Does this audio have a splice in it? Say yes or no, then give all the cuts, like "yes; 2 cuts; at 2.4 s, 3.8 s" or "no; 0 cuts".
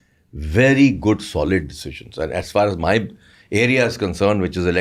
no; 0 cuts